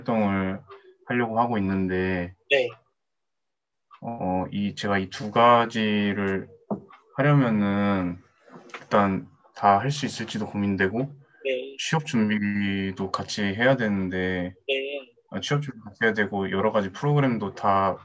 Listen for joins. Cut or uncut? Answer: uncut